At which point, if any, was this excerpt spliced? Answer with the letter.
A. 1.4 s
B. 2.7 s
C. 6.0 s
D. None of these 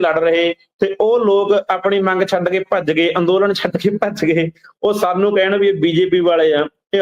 D